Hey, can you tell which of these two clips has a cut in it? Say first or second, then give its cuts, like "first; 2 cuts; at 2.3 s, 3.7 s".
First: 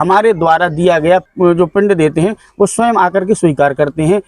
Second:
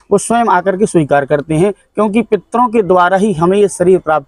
first; 1 cut; at 1.2 s